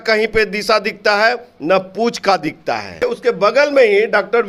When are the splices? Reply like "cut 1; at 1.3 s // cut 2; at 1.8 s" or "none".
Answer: cut 1; at 3.0 s